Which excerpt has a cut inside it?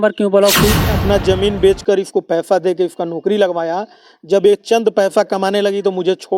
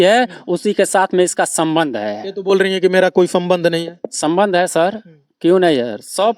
first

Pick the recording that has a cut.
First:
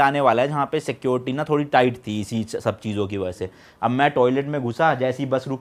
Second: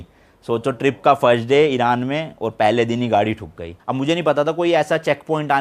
second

